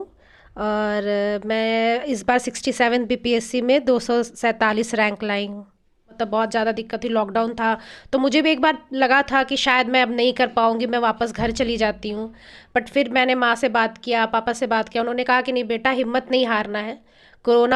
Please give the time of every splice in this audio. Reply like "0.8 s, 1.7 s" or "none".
6.1 s